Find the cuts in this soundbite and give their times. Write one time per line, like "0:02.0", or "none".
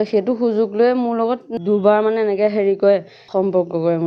0:01.5
0:03.2